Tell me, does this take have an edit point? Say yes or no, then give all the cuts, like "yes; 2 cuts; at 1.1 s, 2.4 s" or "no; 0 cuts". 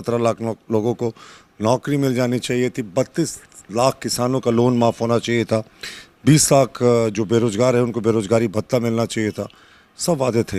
no; 0 cuts